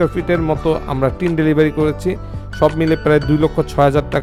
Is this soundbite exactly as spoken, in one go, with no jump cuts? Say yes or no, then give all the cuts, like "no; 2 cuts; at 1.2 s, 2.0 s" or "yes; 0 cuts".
yes; 0 cuts